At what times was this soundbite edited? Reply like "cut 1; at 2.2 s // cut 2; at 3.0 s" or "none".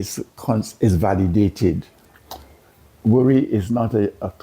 cut 1; at 2.0 s